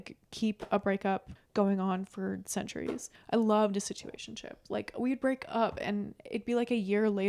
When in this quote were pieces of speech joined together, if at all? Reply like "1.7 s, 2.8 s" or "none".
1.4 s, 3.1 s